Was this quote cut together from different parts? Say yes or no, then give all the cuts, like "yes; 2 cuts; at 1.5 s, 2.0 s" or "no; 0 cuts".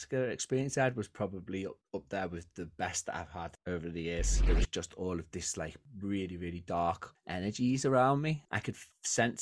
yes; 2 cuts; at 4.4 s, 8.5 s